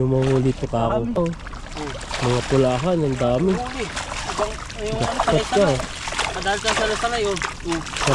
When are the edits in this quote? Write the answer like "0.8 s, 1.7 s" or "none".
1.2 s

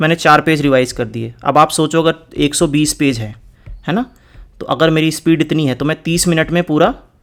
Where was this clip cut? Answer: none

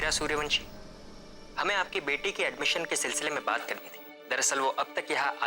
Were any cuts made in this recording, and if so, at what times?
3.7 s

